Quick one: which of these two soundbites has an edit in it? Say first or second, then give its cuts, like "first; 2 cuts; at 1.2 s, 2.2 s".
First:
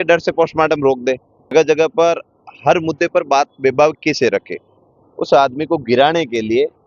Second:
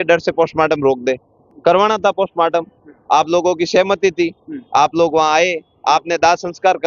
first; 1 cut; at 1.5 s